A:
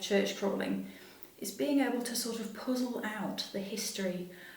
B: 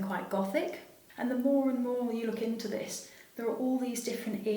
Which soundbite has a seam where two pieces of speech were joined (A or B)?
B